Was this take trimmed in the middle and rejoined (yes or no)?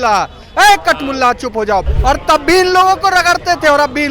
yes